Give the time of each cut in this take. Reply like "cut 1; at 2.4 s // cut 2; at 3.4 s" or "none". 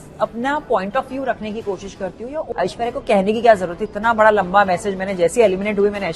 cut 1; at 2.5 s